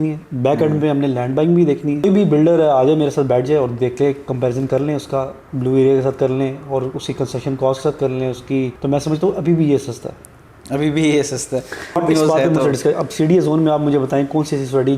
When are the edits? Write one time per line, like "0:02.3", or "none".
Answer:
0:02.0
0:08.8
0:12.0